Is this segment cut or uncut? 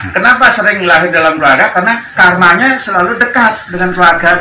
uncut